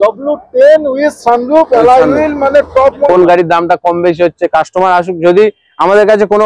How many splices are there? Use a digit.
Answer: 1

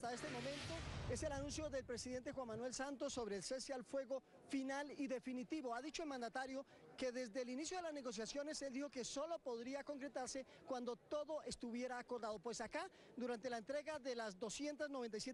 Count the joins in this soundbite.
0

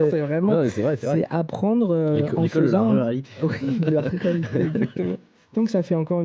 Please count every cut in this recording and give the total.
1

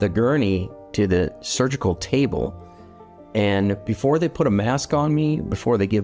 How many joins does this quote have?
0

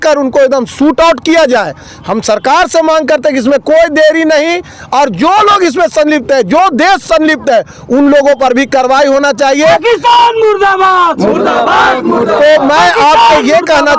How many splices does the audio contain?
0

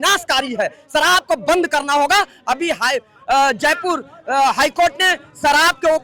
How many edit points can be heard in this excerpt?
0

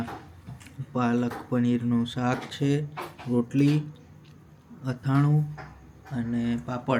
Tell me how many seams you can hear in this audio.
0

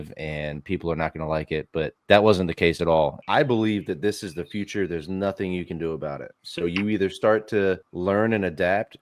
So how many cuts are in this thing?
1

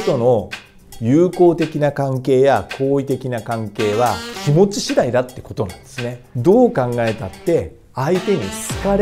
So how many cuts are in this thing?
2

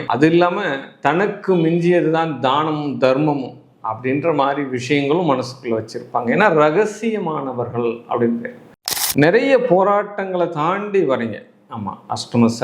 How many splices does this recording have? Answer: 1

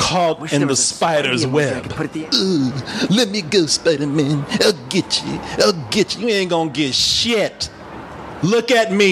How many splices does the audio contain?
1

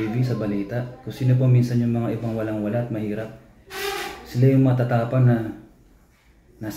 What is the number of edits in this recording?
0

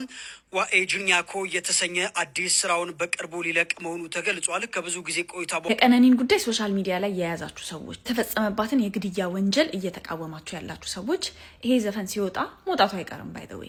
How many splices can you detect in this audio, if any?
0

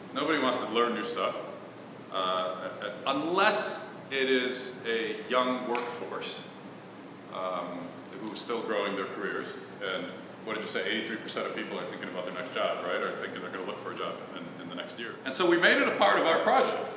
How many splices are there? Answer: 1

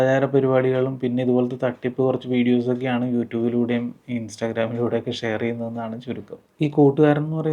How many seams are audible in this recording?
0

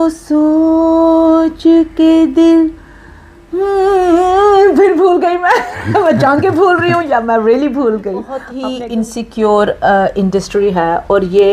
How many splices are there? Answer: 1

